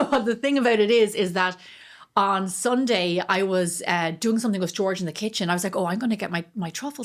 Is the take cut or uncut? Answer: uncut